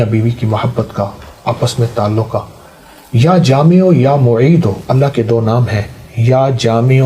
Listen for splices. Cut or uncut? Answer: uncut